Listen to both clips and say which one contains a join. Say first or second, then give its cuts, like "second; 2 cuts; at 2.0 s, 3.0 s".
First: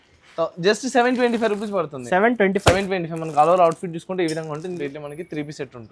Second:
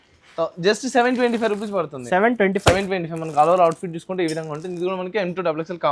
first; 1 cut; at 4.8 s